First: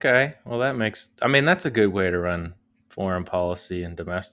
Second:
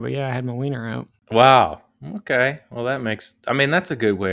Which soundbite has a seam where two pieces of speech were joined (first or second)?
second